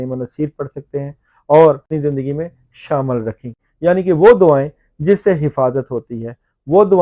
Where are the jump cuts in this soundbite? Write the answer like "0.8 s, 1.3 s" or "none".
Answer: 1.9 s